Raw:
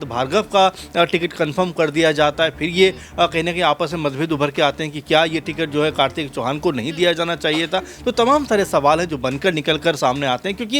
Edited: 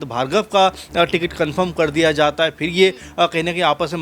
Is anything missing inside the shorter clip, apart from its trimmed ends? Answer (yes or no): no